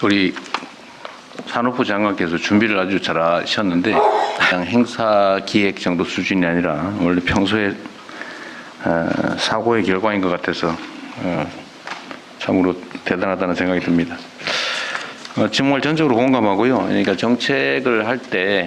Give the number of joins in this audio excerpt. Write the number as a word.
one